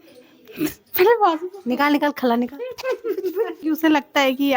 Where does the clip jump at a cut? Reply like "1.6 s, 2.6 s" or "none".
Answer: 3.6 s